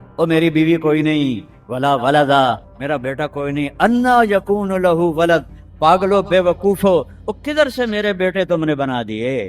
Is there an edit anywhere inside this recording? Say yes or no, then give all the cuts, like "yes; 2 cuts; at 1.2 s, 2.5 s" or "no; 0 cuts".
no; 0 cuts